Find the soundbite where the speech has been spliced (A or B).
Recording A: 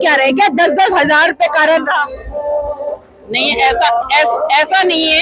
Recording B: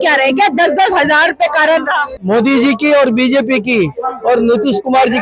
B